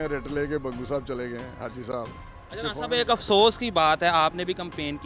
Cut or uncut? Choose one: uncut